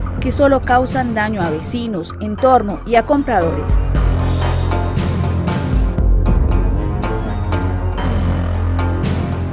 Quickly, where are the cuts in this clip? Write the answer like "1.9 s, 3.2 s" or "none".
none